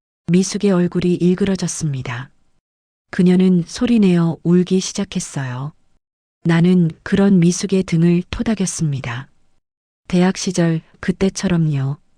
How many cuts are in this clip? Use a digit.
1